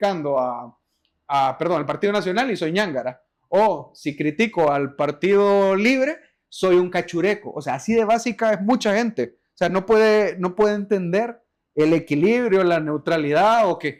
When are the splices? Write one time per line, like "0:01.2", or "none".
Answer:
none

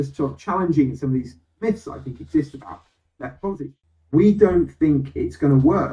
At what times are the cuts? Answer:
0:03.6

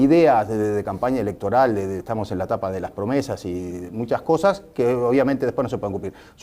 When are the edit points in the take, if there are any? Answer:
0:00.9

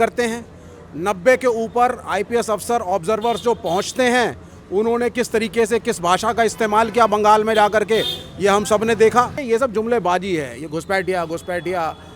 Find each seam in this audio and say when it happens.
0:09.4

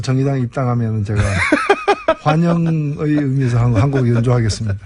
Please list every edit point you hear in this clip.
none

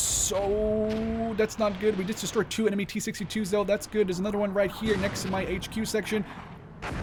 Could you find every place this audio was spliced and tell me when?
none

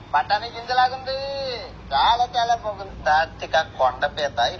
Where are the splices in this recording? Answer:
0:02.9

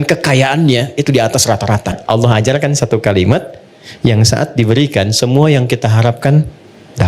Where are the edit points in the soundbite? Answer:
0:02.0

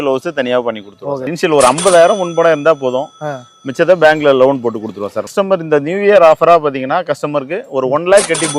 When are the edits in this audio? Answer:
0:01.3
0:05.4

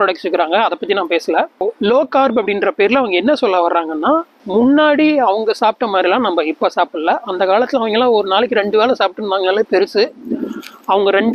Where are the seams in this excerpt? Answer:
0:01.6
0:04.4

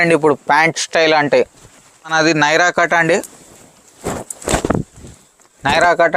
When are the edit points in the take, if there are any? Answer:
0:02.1

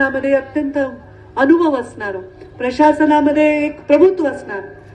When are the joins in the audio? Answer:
none

